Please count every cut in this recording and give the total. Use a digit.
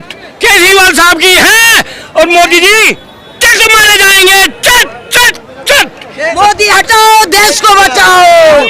1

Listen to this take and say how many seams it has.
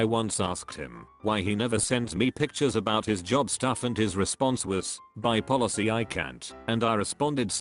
1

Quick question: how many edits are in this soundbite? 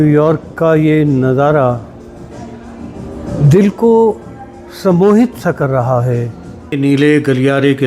1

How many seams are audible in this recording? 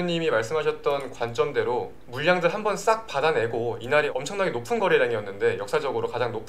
2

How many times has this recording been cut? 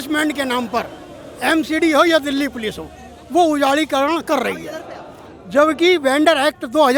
0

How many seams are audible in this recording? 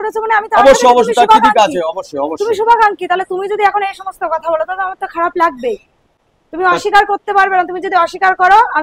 0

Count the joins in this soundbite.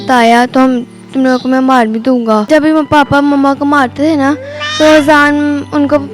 1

